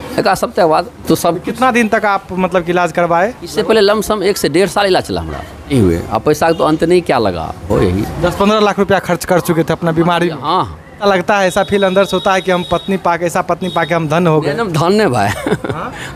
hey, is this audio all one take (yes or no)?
no